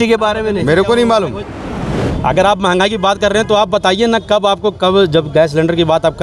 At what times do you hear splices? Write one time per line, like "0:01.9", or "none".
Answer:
0:01.7